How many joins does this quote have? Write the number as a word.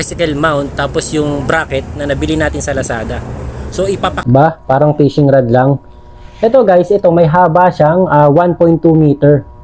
one